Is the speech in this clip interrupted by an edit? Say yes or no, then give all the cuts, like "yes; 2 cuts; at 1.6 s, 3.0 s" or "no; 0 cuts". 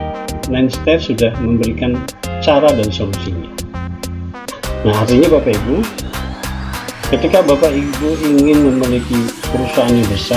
yes; 2 cuts; at 3.3 s, 4.8 s